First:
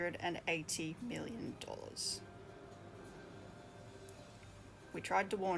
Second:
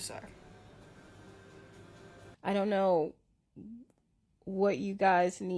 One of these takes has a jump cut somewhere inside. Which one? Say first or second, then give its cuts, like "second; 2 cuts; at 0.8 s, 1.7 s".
second; 1 cut; at 2.3 s